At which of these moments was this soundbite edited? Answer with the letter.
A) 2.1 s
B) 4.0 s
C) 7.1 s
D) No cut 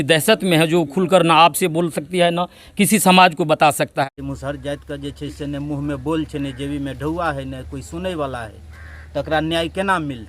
B